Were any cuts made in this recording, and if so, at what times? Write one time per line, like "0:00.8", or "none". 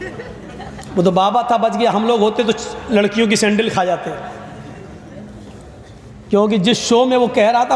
none

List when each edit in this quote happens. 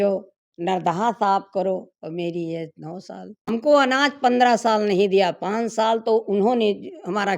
0:03.4

